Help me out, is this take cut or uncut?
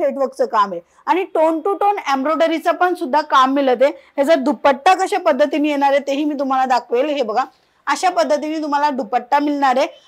uncut